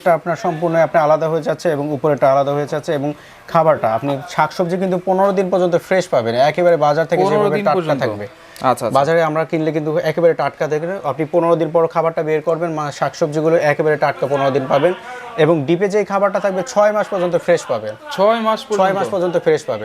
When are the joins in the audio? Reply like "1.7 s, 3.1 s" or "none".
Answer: none